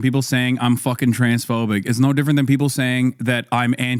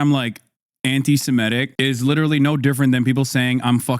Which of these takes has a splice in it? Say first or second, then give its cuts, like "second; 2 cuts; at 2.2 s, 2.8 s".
second; 1 cut; at 1.7 s